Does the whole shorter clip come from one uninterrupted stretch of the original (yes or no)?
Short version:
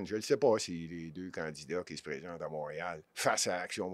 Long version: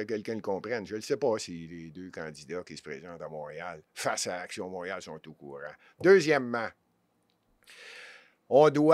yes